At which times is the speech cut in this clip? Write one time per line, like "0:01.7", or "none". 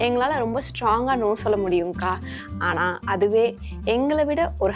none